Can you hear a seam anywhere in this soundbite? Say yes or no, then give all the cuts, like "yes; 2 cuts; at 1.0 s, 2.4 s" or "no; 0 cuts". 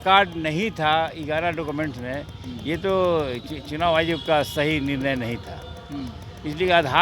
no; 0 cuts